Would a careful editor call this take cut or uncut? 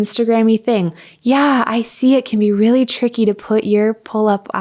uncut